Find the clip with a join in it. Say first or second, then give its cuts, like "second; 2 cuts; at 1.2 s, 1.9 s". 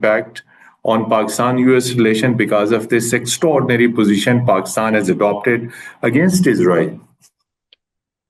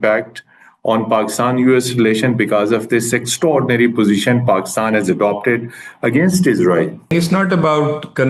second; 1 cut; at 7.1 s